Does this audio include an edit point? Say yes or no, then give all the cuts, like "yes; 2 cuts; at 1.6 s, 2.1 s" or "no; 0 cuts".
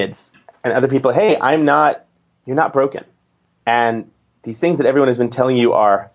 no; 0 cuts